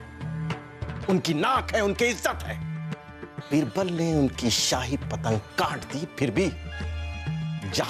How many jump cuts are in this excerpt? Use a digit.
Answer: 0